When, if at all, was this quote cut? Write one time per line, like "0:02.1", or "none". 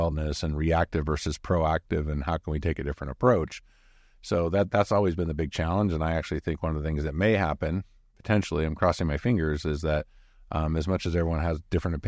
none